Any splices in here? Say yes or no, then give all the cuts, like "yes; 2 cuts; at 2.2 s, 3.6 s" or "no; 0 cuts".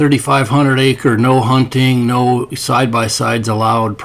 no; 0 cuts